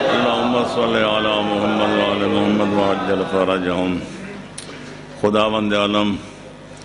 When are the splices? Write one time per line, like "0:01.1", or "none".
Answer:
0:04.7